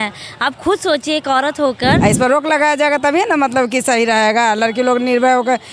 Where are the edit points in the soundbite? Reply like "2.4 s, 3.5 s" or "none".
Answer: 2.0 s